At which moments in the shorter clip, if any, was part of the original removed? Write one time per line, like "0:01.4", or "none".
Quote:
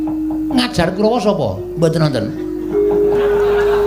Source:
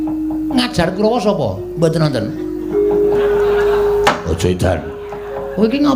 none